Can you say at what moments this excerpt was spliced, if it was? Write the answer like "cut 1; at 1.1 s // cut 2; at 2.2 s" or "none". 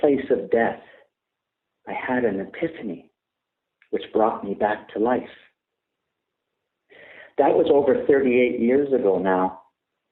none